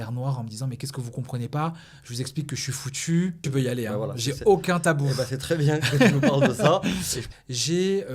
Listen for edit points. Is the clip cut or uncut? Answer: cut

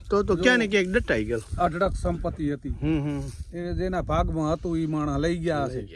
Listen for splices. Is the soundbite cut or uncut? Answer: uncut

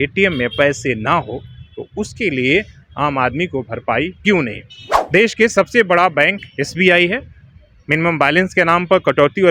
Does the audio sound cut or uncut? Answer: uncut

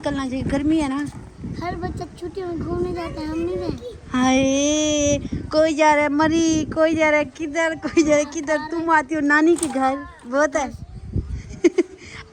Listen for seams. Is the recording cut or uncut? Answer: uncut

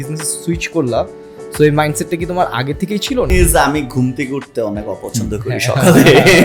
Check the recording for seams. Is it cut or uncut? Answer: cut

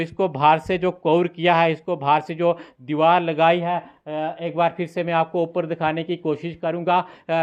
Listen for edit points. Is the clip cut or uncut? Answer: uncut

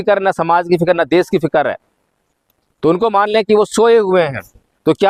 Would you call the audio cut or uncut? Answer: uncut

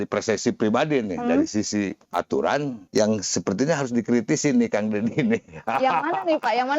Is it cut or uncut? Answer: cut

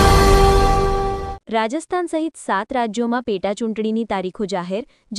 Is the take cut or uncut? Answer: cut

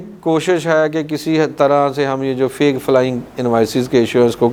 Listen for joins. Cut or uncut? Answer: uncut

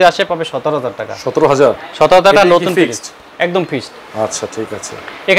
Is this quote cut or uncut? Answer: uncut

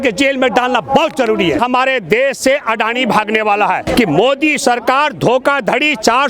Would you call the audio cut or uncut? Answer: cut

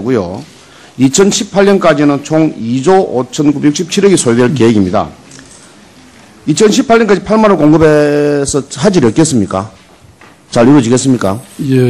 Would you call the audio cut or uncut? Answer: uncut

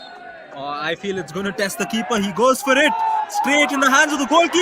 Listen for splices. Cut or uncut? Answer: uncut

